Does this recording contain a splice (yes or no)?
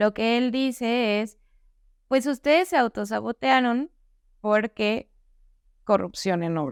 no